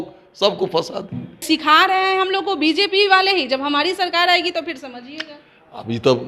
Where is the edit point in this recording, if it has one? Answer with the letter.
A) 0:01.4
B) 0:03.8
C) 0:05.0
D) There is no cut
A